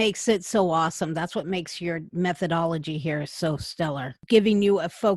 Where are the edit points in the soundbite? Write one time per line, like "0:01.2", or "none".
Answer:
0:02.1
0:04.2